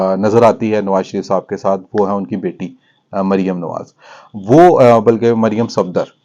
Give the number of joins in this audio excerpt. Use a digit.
0